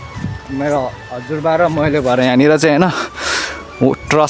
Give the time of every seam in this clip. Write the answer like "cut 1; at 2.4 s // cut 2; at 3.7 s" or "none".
none